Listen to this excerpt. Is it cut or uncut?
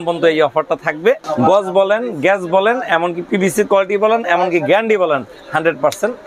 cut